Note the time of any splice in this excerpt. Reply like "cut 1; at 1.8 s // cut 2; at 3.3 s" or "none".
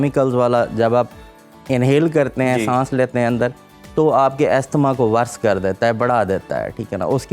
none